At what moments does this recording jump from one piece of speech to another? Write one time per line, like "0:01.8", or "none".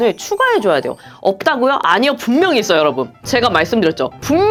none